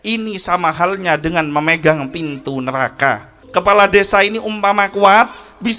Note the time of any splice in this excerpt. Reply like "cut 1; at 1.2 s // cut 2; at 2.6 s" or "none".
cut 1; at 3.4 s